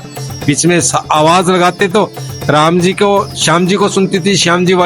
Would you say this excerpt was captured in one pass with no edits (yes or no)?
yes